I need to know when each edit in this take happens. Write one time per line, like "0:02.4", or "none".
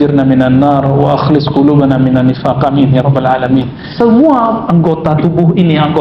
0:03.8